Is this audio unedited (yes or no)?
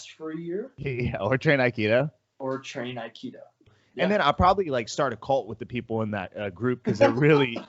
no